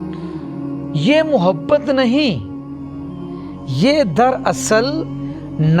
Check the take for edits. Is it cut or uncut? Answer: cut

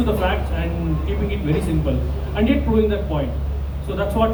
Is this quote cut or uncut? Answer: uncut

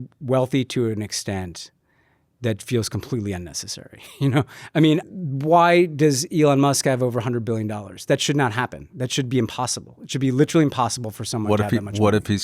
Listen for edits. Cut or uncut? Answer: cut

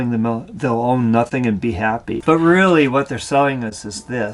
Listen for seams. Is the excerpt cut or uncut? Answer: cut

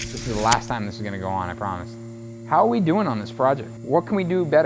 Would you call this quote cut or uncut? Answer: cut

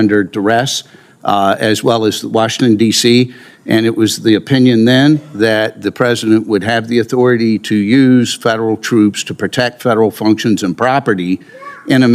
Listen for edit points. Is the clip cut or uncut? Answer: uncut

